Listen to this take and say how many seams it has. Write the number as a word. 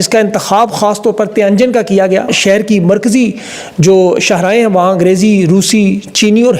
one